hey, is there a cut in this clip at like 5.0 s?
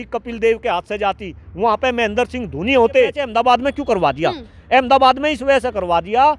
no; 1 cut; at 3.3 s

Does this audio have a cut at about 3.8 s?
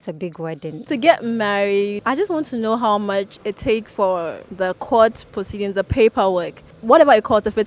yes; 3 cuts; at 0.9 s, 2.0 s, 3.8 s

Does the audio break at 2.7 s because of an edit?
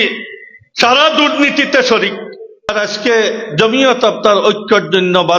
yes; 1 cut; at 2.7 s

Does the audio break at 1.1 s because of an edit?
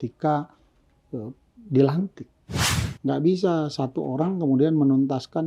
no; 1 cut; at 2.7 s

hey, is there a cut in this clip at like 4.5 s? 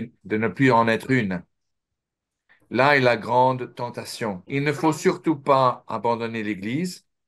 yes; 1 cut; at 4.5 s

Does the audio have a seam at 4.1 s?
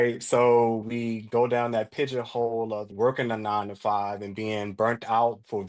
no; 0 cuts

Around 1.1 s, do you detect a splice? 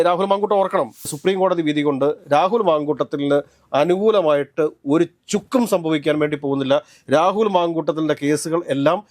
yes; 1 cut; at 1.1 s

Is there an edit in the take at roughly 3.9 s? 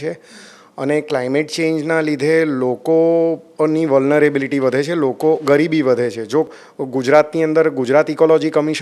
no; 1 cut; at 6.5 s

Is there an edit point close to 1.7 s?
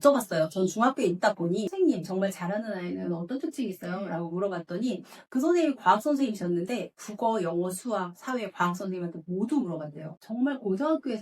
yes; 1 cut; at 1.7 s

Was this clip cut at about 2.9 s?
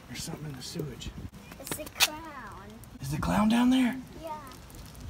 yes; 2 cuts; at 1.4 s, 2.9 s

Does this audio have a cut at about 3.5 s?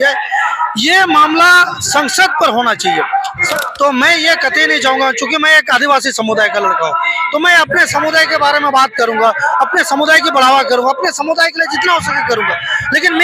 yes; 1 cut; at 3.5 s

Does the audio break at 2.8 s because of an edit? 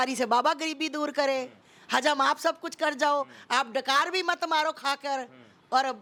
no; 0 cuts

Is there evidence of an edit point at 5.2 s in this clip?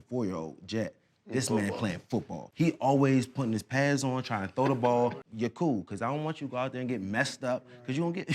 yes; 2 cuts; at 2.4 s, 5.2 s

